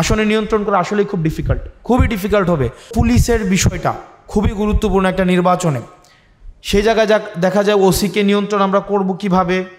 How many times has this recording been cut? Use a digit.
1